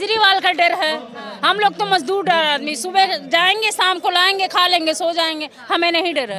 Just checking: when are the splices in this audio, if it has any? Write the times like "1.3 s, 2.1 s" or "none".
none